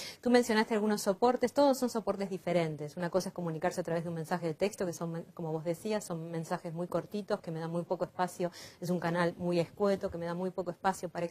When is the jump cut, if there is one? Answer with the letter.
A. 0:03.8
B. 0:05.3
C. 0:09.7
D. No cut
D